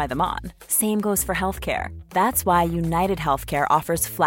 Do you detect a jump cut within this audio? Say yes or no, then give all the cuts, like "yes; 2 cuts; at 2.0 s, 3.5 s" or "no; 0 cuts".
no; 0 cuts